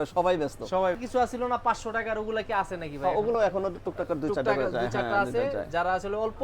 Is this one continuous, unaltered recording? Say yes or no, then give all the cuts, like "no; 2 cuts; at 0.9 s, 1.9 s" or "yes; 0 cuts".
no; 1 cut; at 1.0 s